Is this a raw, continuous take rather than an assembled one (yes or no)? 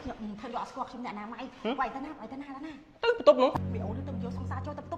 no